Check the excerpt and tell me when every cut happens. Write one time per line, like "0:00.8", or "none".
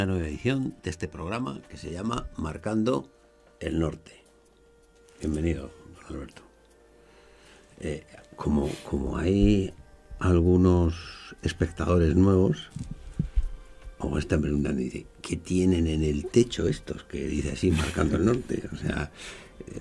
none